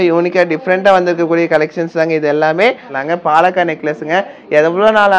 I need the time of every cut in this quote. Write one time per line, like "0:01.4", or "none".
0:02.9